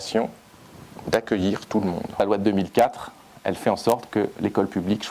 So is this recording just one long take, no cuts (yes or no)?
no